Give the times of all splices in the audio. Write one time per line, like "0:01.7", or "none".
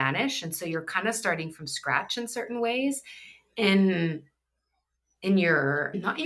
none